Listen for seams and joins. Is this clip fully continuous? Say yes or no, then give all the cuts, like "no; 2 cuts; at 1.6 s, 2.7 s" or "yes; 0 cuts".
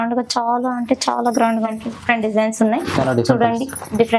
no; 1 cut; at 1.7 s